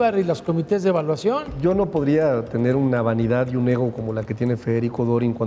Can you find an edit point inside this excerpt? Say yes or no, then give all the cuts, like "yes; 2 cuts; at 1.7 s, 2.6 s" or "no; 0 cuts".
yes; 1 cut; at 1.5 s